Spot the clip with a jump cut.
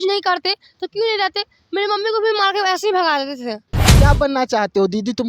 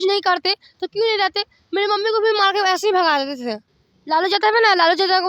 first; 1 cut; at 3.8 s

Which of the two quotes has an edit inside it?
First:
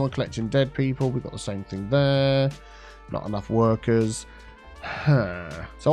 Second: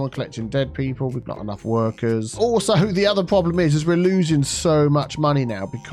second; 2 cuts; at 1.3 s, 2.3 s

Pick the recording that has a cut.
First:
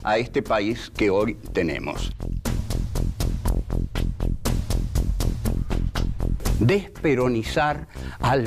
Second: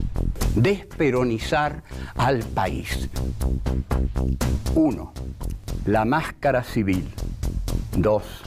second; 1 cut; at 5.1 s

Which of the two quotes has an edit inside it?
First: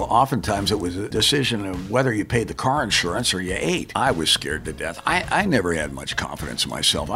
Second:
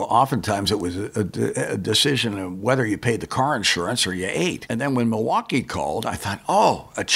first; 2 cuts; at 1.1 s, 3.9 s

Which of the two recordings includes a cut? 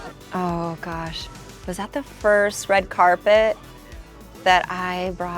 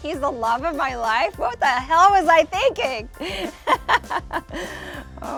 first; 1 cut; at 1.2 s

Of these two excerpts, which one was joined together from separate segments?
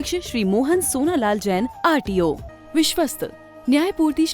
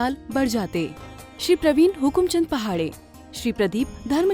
first; 1 cut; at 2.5 s

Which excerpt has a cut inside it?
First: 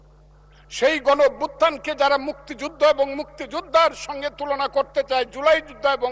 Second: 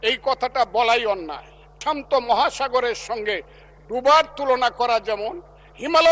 second; 1 cut; at 1.8 s

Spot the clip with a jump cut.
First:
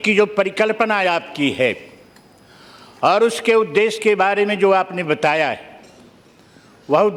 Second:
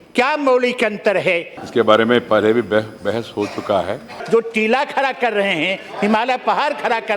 second; 2 cuts; at 1.5 s, 4.2 s

